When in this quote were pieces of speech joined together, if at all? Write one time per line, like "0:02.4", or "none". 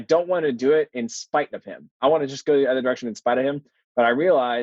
0:02.0